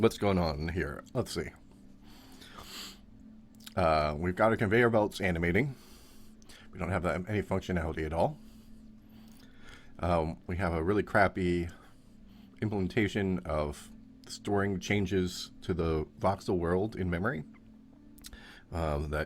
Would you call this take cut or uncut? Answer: cut